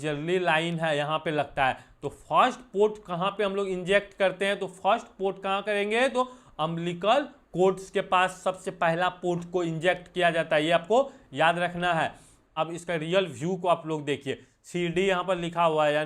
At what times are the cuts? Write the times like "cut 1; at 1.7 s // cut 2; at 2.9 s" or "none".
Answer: cut 1; at 12.5 s